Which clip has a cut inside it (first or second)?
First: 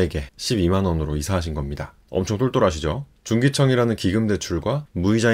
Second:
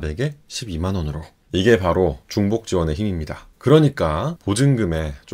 second